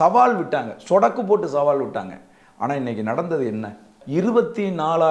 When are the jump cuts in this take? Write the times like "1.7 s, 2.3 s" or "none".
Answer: 4.0 s